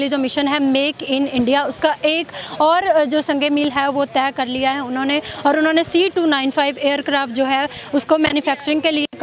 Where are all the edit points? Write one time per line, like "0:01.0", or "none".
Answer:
none